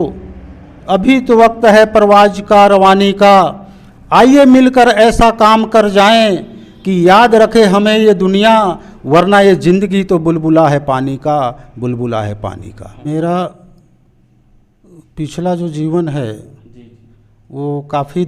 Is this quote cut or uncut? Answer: cut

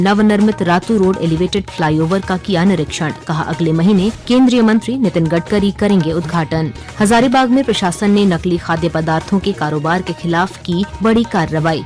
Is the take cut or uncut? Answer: cut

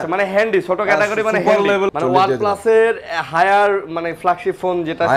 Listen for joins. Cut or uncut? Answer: cut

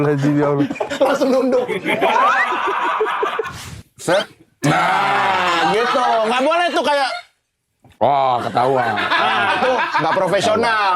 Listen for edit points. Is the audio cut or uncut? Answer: cut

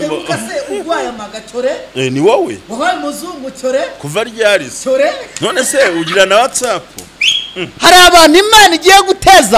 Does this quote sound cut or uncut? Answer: uncut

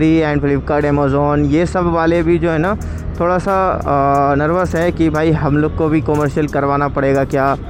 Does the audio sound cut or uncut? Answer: uncut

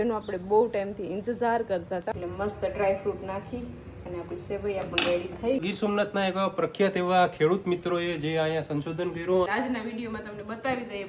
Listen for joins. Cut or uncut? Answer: cut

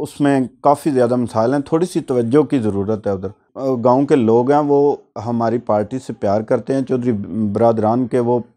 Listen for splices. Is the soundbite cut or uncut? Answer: uncut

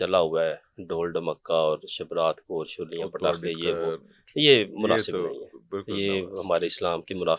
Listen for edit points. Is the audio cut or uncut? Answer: uncut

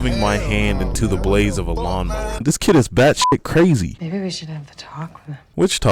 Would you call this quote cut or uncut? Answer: cut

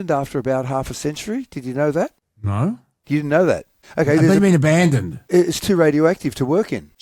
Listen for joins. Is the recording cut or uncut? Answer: uncut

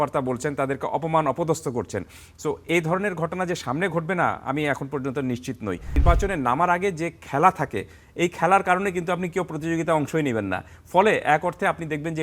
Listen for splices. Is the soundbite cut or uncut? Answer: cut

